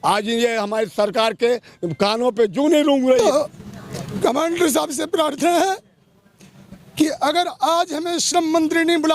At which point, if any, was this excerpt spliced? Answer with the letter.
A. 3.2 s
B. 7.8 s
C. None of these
A